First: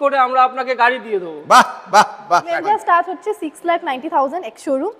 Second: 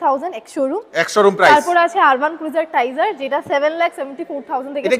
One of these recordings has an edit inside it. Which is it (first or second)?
first